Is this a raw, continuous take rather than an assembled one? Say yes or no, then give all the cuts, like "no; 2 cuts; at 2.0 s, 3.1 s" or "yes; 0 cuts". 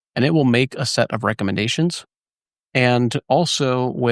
yes; 0 cuts